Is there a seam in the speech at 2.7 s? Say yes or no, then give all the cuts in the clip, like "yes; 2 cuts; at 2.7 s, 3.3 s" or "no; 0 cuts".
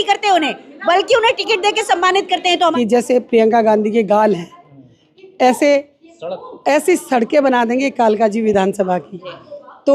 yes; 1 cut; at 2.7 s